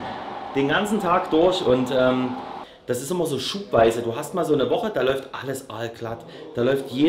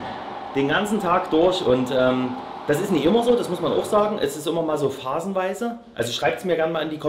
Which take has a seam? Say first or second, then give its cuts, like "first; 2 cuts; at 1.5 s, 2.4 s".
first; 1 cut; at 2.5 s